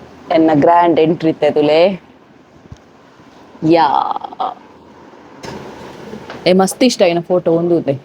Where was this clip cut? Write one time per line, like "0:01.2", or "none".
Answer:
0:05.4